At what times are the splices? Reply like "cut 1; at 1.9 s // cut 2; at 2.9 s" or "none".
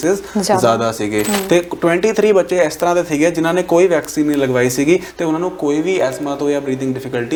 none